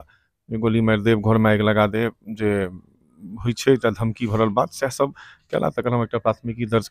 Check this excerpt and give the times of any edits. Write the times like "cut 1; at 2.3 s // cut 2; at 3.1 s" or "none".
none